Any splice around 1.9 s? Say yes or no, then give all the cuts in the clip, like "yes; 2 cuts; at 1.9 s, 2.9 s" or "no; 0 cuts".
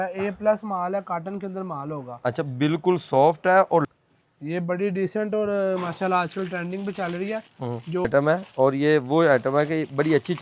no; 2 cuts; at 3.9 s, 8.1 s